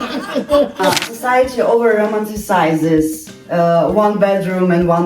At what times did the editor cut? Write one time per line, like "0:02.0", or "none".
0:01.0